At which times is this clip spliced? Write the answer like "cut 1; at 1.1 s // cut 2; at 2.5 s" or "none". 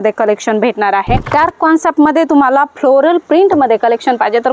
cut 1; at 1.3 s